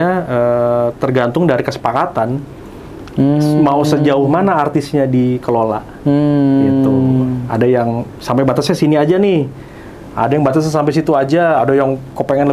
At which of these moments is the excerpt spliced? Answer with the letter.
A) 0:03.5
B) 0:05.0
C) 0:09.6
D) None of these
D